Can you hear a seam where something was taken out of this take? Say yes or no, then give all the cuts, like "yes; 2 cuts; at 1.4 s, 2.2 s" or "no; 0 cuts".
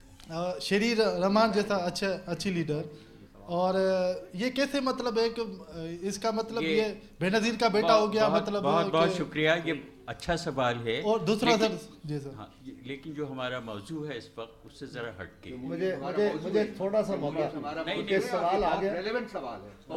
no; 0 cuts